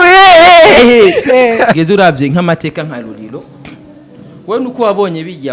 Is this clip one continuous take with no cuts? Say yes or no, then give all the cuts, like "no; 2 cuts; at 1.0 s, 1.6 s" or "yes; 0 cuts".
no; 1 cut; at 1.7 s